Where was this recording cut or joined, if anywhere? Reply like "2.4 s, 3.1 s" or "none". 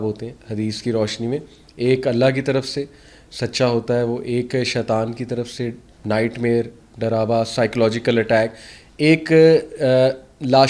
none